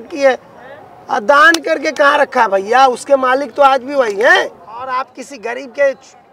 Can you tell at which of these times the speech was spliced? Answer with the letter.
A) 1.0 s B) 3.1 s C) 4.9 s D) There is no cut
C